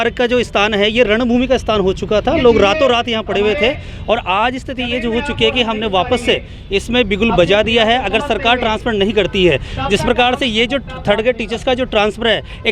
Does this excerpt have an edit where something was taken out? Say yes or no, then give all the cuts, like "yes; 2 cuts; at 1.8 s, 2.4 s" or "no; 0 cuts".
no; 0 cuts